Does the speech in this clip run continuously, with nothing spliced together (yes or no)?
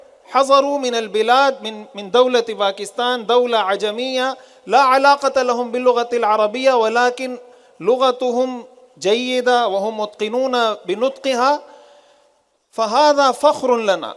yes